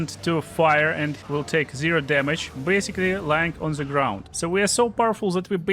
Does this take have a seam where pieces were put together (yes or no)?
yes